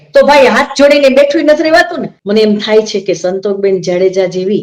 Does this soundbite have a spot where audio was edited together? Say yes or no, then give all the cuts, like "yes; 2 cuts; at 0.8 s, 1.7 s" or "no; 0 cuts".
yes; 1 cut; at 2.1 s